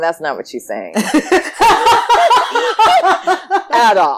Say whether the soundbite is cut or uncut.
uncut